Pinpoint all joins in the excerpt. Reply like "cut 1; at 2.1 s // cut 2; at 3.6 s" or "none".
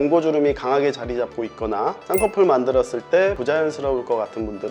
cut 1; at 2.0 s // cut 2; at 3.4 s